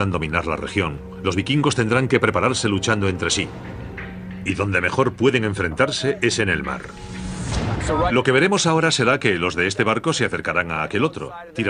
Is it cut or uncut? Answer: uncut